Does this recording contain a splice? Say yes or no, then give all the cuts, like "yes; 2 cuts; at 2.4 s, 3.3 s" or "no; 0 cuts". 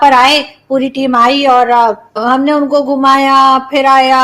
yes; 1 cut; at 2.2 s